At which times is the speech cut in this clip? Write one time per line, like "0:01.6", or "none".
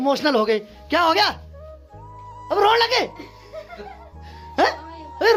none

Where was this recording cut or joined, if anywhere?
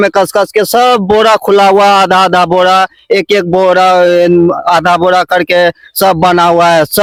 none

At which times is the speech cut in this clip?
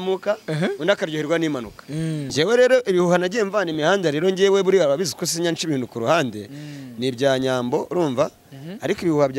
0:02.3

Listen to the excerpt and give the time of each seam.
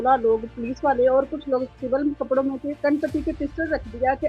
0:02.8

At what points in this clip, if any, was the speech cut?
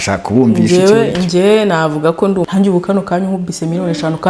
0:02.5

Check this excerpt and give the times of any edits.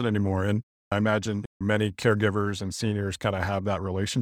0:00.9

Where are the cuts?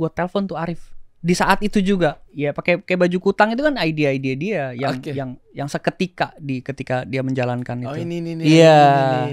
0:02.2
0:05.4

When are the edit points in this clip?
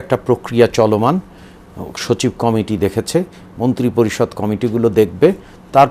none

